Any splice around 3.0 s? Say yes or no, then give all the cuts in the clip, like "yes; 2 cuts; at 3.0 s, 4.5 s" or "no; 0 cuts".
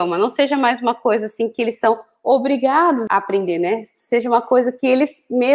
yes; 1 cut; at 3.0 s